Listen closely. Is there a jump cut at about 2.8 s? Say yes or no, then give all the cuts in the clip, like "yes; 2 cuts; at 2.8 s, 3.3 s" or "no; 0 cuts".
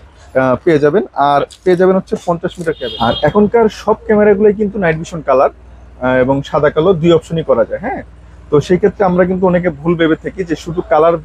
yes; 1 cut; at 2.8 s